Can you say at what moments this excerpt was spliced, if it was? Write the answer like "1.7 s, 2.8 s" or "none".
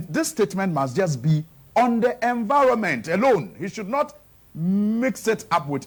none